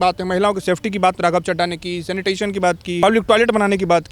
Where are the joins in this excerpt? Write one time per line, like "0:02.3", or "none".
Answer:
0:03.0